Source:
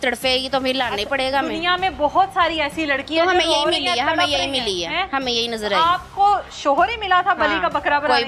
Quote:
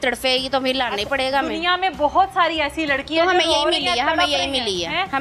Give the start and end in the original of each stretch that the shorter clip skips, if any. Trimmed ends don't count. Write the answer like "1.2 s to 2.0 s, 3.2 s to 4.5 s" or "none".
none